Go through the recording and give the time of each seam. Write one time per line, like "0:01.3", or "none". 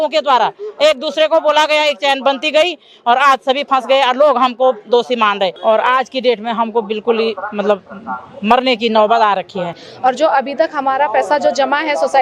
0:05.6
0:09.8